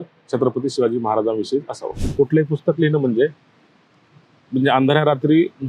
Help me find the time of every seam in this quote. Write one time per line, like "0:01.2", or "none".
0:02.1